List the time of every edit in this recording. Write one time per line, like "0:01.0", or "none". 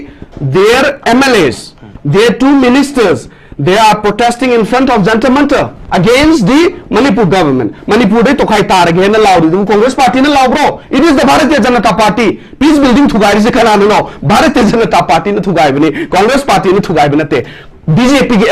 0:17.6